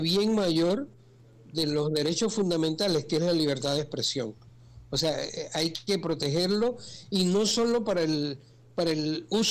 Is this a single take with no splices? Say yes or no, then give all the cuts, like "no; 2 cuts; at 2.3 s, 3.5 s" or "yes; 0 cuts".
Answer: yes; 0 cuts